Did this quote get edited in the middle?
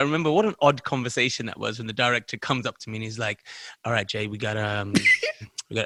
no; 0 cuts

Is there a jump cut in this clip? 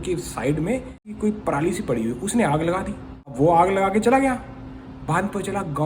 yes; 2 cuts; at 1.2 s, 3.3 s

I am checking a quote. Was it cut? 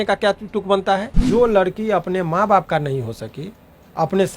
yes; 1 cut; at 1.2 s

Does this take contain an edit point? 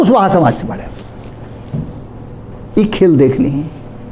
no; 0 cuts

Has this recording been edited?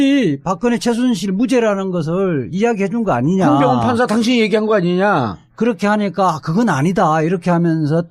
no; 0 cuts

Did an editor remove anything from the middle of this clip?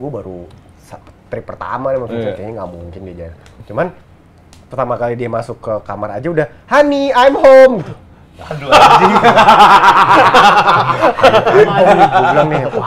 no; 0 cuts

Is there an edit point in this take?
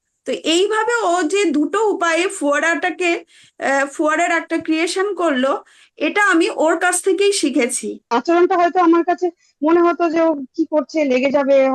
yes; 1 cut; at 8.1 s

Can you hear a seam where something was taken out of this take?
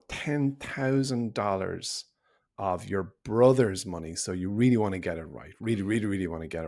yes; 1 cut; at 2.5 s

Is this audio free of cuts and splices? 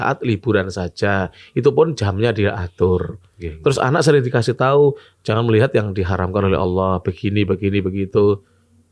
yes; 0 cuts

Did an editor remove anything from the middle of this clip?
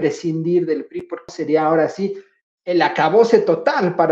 yes; 1 cut; at 1.3 s

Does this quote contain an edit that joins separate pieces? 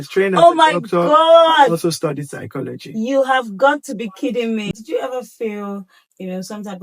yes; 1 cut; at 4.7 s

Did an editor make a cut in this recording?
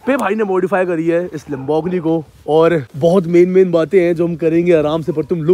yes; 1 cut; at 2.9 s

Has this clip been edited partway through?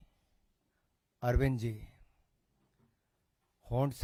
no; 0 cuts

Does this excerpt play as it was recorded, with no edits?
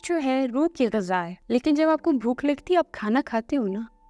no; 1 cut; at 1.4 s

